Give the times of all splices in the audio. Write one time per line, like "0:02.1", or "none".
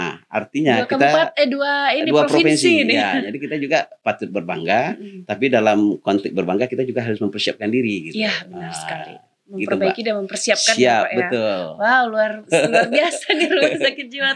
0:04.0